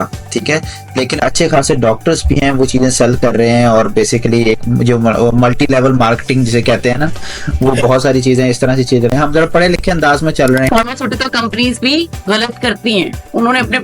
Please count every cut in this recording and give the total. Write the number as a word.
one